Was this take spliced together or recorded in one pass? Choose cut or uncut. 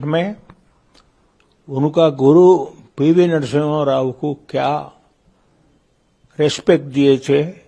uncut